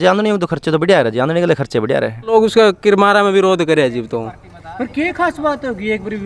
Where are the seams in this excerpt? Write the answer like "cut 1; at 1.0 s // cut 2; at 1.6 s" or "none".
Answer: cut 1; at 2.3 s